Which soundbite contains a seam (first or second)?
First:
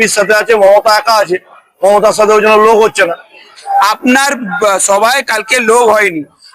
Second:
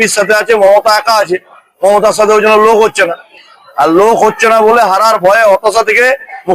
first